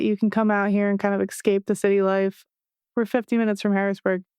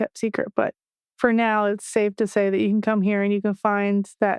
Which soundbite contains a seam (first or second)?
first